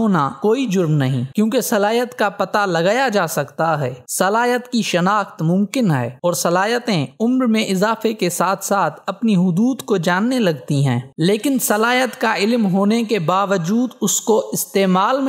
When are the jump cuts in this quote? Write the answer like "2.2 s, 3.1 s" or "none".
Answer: none